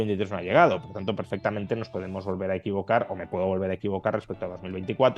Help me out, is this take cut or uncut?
uncut